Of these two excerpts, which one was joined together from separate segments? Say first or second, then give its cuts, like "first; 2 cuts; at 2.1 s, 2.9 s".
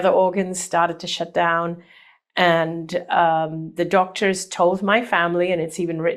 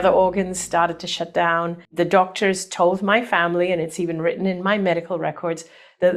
second; 1 cut; at 1.8 s